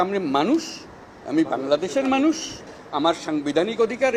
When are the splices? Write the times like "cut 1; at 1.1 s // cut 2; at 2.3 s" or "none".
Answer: none